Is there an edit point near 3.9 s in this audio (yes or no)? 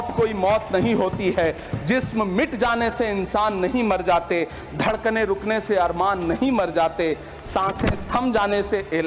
no